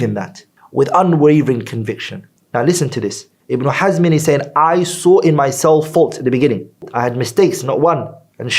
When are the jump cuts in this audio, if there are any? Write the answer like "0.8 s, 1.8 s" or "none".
2.3 s